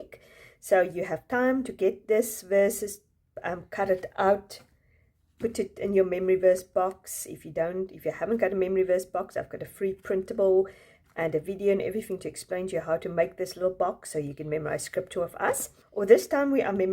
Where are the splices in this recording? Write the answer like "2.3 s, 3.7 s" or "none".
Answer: 15.8 s